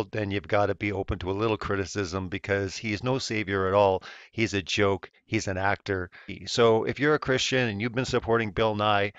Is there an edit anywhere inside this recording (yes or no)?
no